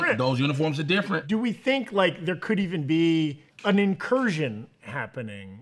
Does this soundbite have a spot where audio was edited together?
yes; 2 cuts; at 1.2 s, 3.5 s

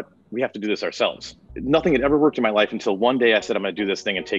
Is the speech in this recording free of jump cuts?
yes; 0 cuts

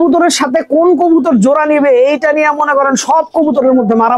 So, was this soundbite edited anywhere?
no; 0 cuts

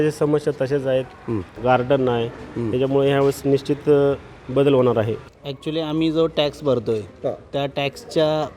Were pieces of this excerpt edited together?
yes; 2 cuts; at 1.5 s, 5.2 s

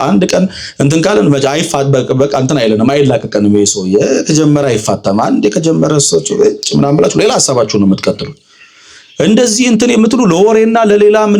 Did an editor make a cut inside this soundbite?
no; 0 cuts

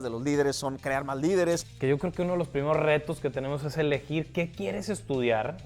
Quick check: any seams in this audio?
yes; 1 cut; at 1.7 s

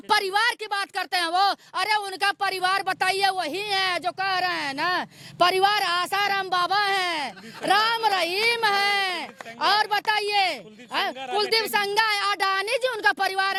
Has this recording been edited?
no; 0 cuts

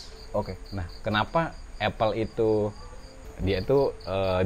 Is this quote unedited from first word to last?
no; 1 cut; at 2.8 s

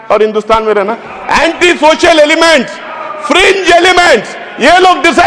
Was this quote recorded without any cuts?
yes; 0 cuts

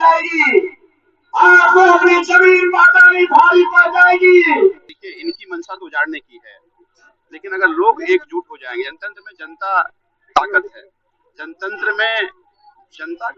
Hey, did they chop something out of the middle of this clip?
yes; 1 cut; at 4.9 s

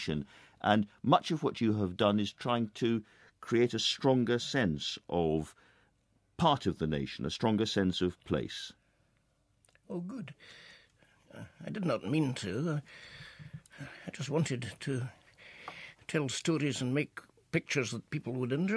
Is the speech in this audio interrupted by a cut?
no; 0 cuts

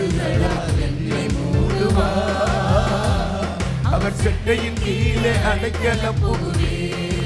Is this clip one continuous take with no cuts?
yes; 0 cuts

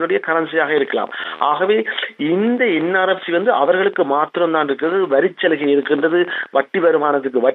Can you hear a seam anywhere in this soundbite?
no; 0 cuts

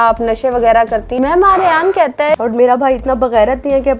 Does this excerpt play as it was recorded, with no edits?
no; 2 cuts; at 1.1 s, 2.4 s

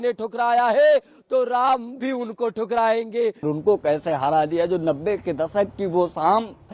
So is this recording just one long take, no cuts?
no; 1 cut; at 3.5 s

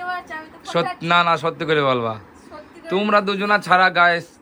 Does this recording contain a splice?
no; 0 cuts

